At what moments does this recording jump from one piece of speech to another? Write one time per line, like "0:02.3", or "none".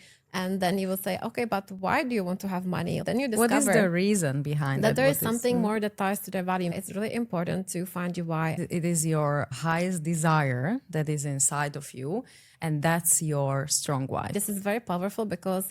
0:06.7
0:08.6
0:14.3